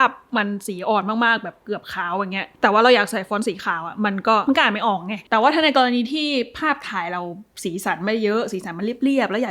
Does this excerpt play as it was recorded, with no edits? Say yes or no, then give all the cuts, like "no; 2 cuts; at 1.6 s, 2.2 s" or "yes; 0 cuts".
no; 2 cuts; at 2.4 s, 4.8 s